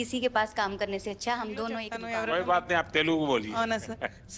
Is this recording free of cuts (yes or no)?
no